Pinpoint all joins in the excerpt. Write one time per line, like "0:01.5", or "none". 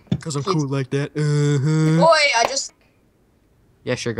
0:02.7